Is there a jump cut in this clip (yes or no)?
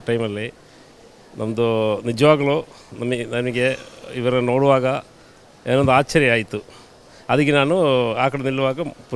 no